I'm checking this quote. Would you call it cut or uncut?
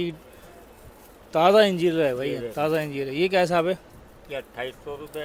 uncut